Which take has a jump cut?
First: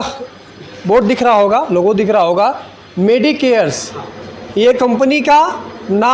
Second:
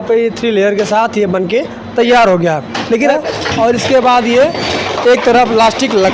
second; 1 cut; at 3.1 s

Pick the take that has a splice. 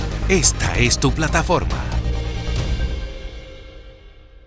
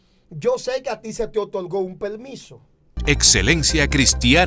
second; 1 cut; at 3.0 s

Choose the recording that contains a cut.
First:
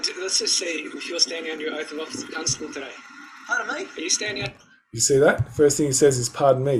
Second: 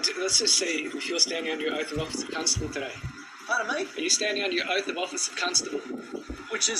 second; 1 cut; at 4.5 s

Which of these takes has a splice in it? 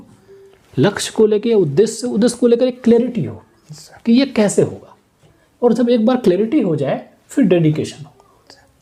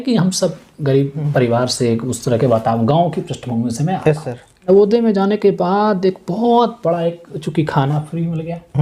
second; 2 cuts; at 1.2 s, 4.7 s

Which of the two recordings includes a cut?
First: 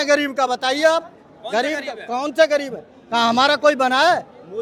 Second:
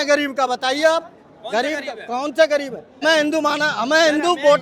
second; 1 cut; at 3.0 s

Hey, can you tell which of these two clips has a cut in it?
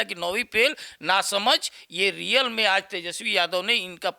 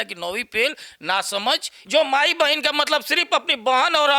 second; 1 cut; at 1.7 s

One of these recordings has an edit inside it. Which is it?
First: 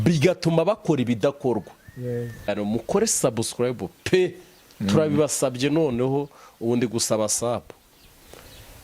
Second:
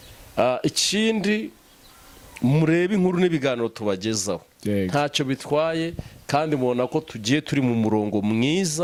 first; 1 cut; at 2.5 s

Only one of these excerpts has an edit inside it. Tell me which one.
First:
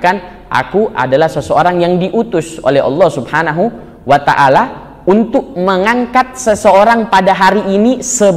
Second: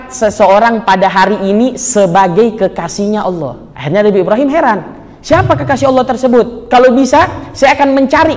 second; 1 cut; at 3.7 s

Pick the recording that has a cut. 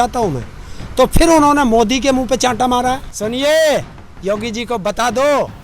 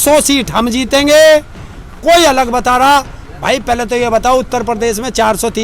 first; 1 cut; at 3.1 s

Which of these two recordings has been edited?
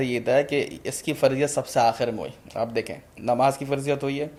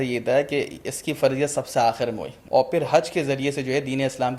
second; 1 cut; at 2.3 s

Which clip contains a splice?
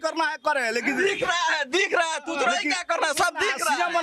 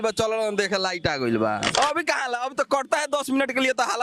second; 1 cut; at 1.8 s

